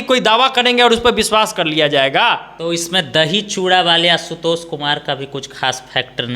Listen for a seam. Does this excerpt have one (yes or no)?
yes